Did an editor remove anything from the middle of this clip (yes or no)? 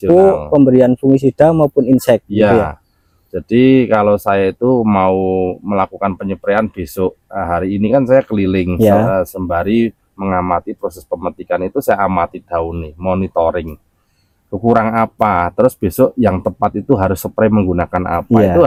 no